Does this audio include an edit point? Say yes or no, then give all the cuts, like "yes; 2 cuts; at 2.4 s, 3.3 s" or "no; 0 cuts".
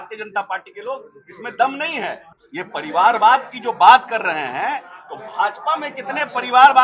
yes; 1 cut; at 2.3 s